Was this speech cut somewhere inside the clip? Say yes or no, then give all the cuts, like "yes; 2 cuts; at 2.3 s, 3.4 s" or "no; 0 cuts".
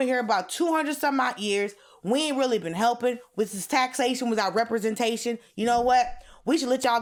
no; 0 cuts